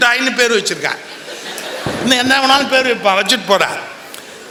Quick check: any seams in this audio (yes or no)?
no